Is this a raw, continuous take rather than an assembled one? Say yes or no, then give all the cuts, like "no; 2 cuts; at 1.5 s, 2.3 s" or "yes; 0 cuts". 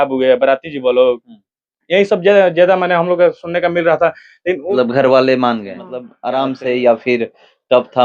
no; 1 cut; at 4.7 s